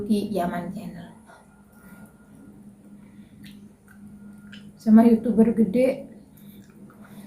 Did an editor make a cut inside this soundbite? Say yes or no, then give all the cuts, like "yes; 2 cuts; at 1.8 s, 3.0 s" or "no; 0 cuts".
no; 0 cuts